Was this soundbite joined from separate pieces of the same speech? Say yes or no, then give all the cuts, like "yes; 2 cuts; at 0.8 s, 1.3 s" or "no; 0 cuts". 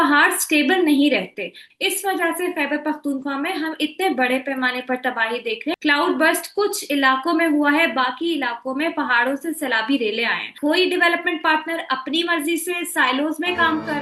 yes; 3 cuts; at 1.6 s, 5.7 s, 10.5 s